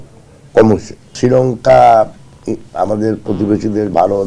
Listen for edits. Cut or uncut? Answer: cut